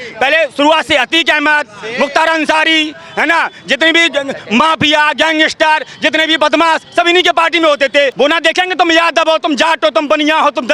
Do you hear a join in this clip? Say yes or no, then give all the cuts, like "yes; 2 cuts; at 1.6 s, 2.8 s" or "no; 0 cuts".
yes; 1 cut; at 8.1 s